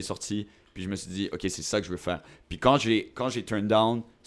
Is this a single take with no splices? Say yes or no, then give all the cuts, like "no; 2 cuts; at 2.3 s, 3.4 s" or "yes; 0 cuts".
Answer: yes; 0 cuts